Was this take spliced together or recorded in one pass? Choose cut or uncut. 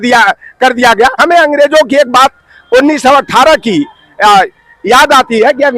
cut